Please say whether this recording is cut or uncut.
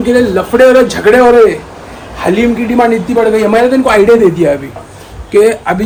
uncut